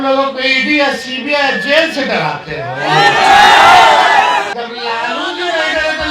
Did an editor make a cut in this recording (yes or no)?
yes